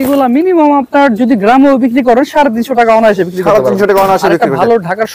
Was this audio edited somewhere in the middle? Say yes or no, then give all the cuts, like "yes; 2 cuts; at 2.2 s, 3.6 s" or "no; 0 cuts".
no; 0 cuts